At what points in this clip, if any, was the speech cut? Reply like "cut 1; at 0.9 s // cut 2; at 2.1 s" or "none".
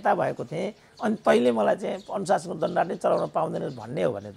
none